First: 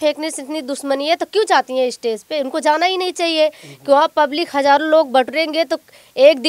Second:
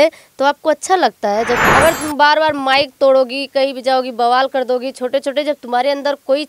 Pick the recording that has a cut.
second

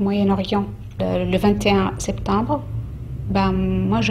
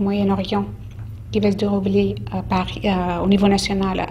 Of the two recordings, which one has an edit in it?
first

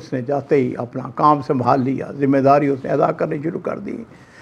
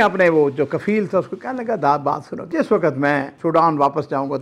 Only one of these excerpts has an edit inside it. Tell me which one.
second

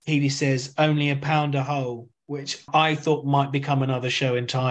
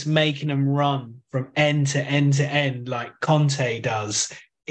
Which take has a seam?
first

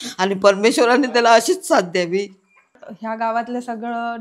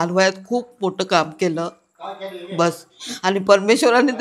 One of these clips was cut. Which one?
first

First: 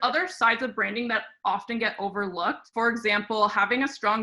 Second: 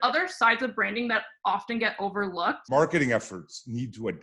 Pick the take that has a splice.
second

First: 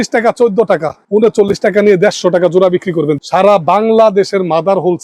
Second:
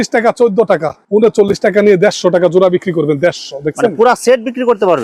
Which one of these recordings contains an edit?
first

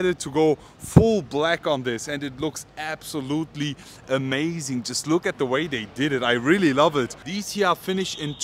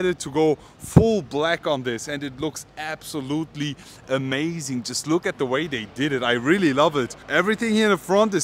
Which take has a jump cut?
first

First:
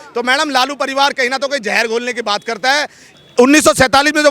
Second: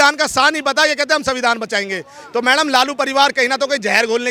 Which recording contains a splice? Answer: first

